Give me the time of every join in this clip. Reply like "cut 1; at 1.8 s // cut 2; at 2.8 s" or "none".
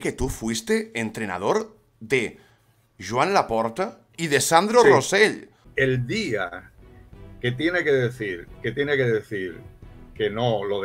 cut 1; at 4.1 s // cut 2; at 5.6 s